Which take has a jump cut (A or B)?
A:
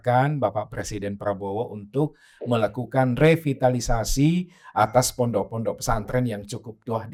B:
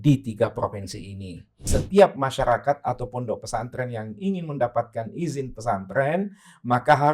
B